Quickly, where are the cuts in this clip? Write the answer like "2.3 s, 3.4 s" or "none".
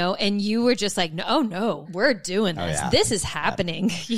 1.9 s